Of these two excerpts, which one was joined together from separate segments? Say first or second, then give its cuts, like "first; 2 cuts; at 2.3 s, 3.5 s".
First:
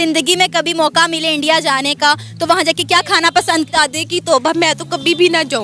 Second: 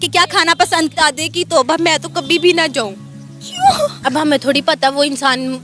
second; 1 cut; at 4.0 s